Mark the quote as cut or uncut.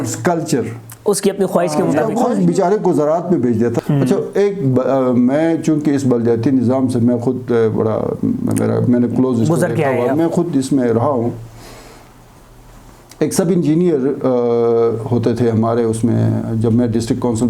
cut